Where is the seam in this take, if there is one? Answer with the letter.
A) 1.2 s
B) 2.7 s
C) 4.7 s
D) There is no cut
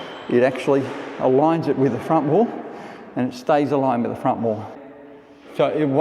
C